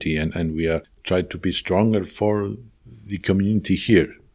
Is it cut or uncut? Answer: cut